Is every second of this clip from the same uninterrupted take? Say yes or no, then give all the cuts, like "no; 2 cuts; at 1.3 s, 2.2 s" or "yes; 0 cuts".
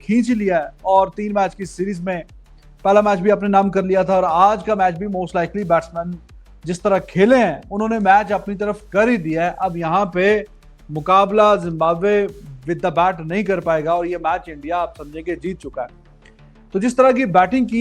yes; 0 cuts